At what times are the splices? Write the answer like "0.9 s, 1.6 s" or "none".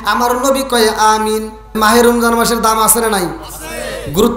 1.8 s